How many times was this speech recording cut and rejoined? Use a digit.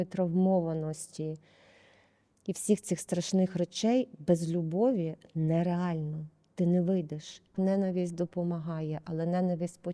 1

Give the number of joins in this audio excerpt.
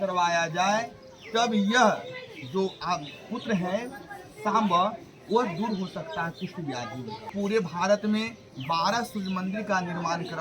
1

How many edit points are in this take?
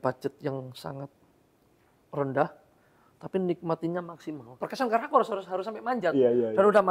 1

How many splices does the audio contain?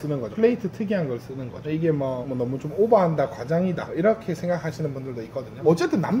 0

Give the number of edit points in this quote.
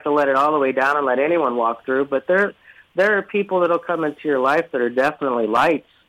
0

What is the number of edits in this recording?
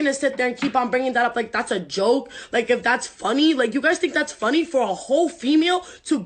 0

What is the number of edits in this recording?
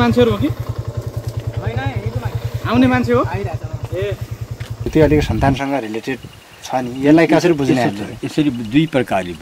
1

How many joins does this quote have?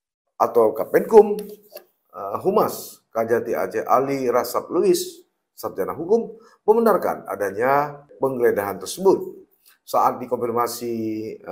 1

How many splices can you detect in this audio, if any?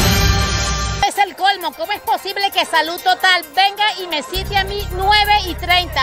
1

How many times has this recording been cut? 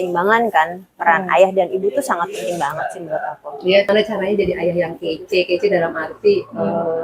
1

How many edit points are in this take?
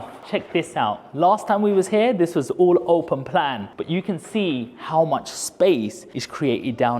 1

